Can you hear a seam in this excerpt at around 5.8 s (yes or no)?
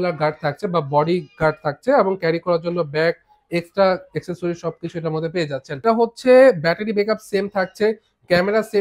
yes